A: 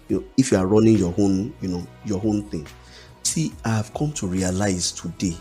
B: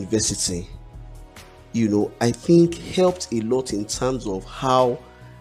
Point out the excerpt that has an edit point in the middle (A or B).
A